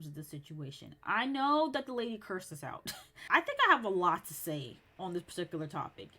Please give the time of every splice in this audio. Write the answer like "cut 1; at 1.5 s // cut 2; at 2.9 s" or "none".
cut 1; at 3.2 s